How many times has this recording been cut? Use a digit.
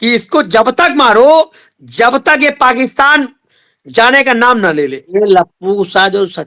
1